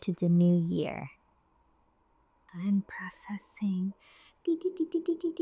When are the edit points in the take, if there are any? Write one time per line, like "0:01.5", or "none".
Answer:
none